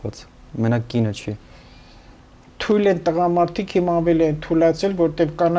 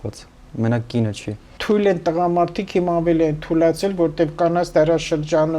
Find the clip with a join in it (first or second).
second